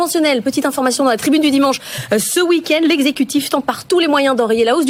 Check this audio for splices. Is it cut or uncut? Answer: uncut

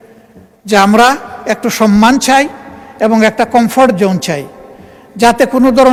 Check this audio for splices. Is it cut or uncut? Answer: uncut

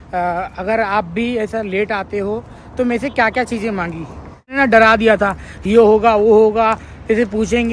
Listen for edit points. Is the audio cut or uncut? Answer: cut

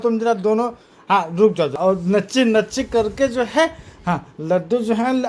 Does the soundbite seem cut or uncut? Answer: cut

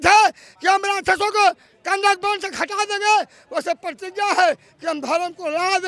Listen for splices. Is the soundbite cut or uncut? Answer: uncut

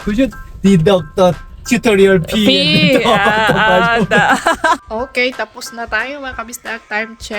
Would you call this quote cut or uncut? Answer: cut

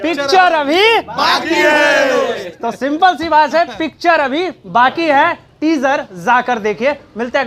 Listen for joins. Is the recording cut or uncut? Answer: uncut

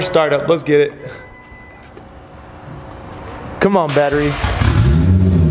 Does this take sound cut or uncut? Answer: uncut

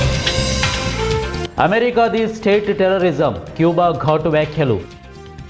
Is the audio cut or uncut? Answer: uncut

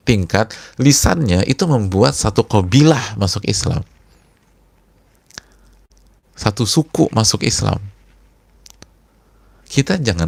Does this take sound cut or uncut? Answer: uncut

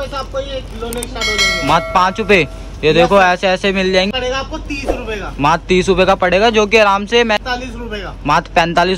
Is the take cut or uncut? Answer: cut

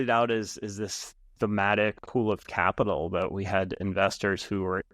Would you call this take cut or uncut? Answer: cut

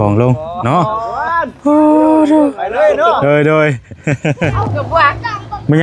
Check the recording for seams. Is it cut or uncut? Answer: cut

